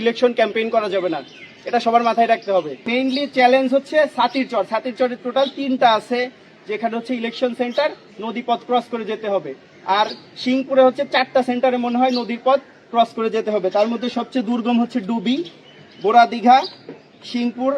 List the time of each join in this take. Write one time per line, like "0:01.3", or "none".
0:02.9